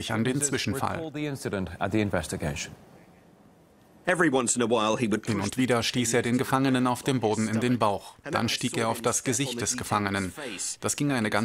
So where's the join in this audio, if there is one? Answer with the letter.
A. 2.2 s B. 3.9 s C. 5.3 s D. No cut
B